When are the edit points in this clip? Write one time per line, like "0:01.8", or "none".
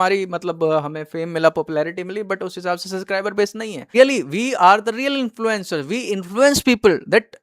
0:03.9

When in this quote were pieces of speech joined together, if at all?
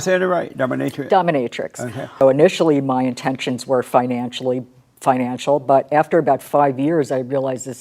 0:02.2

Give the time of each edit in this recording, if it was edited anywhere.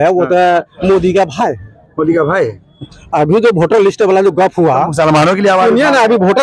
none

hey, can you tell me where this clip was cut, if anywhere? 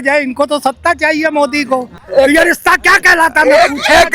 0:01.9

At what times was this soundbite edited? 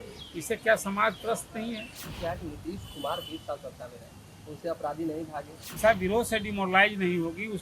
0:02.1
0:05.8

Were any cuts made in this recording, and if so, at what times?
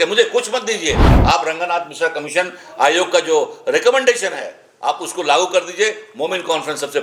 none

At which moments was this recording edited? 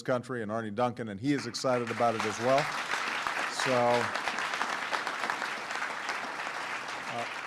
0:04.1

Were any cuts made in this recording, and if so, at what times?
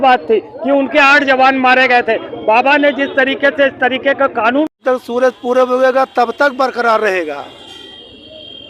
0:04.8

